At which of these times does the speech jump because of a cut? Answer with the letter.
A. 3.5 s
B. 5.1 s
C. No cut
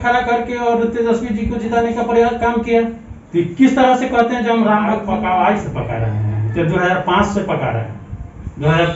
B